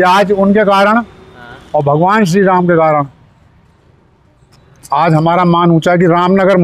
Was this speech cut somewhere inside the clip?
no; 0 cuts

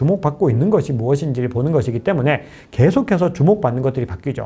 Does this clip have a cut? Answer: no; 0 cuts

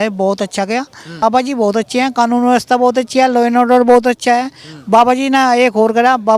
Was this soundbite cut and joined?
yes; 1 cut; at 1.2 s

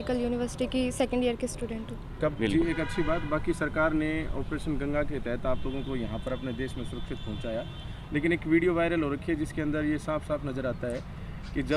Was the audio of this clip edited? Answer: yes; 1 cut; at 2.0 s

